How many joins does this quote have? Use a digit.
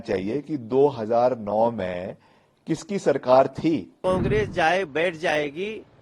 1